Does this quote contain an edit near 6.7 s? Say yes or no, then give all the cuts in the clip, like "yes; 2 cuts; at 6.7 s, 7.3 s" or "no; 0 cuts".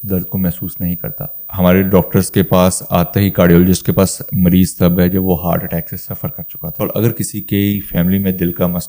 yes; 2 cuts; at 1.4 s, 6.7 s